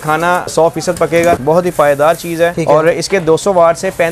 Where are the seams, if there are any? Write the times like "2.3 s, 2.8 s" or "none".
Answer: 1.4 s, 2.6 s